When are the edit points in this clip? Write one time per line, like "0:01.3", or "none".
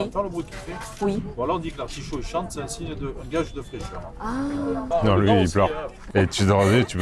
0:04.9
0:06.1